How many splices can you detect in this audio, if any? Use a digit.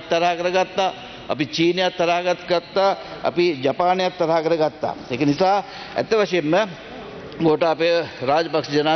0